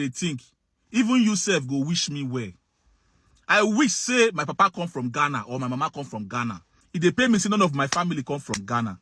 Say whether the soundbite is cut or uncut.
cut